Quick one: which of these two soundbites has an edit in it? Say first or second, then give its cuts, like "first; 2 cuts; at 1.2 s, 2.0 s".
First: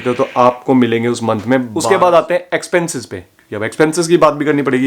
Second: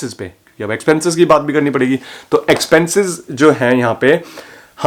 first; 1 cut; at 1.8 s